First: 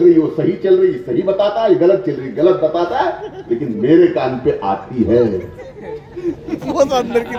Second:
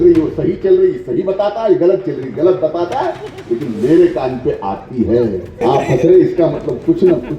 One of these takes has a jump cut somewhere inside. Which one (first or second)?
second